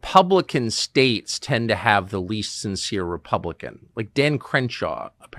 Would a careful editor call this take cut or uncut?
uncut